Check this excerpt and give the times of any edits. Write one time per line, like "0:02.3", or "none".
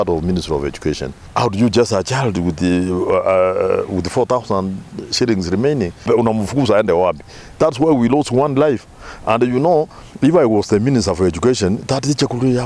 0:01.1
0:06.0
0:10.0